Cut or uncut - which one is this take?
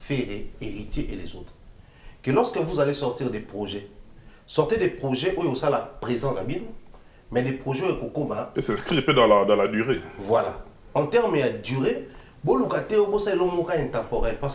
uncut